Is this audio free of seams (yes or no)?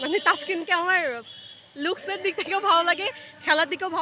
yes